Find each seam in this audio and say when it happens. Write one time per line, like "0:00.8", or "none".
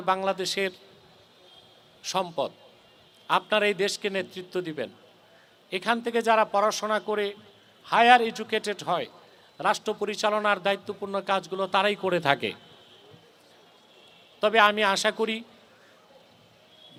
none

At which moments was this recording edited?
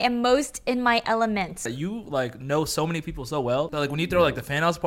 0:01.7
0:03.7

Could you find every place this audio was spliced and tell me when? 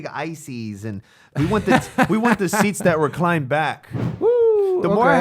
0:03.9

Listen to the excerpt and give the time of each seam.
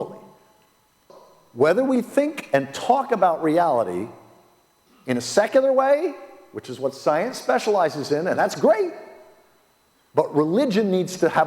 0:01.0

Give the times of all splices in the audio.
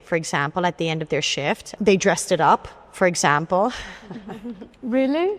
0:01.7

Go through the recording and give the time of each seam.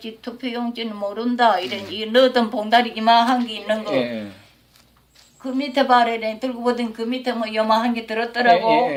none

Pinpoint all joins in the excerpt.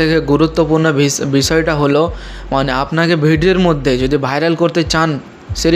none

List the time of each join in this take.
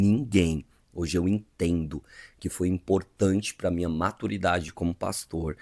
0:04.7

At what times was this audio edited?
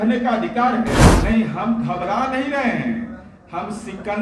0:01.1

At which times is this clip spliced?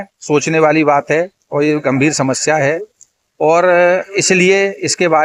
none

